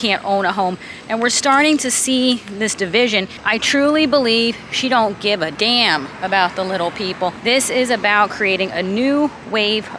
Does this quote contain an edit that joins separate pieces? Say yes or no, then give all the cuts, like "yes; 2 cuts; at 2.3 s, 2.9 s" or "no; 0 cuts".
yes; 3 cuts; at 3.4 s, 5.5 s, 7.4 s